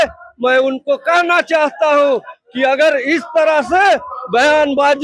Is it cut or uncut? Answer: uncut